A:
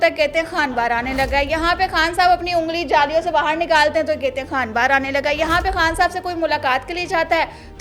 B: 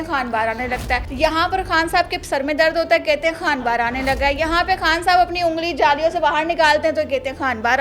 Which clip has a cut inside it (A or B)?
B